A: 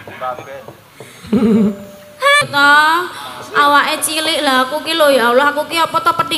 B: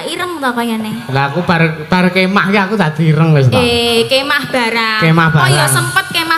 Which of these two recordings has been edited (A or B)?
A